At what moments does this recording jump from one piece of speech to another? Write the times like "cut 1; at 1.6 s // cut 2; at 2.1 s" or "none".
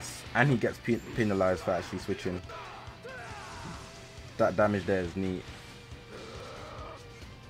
none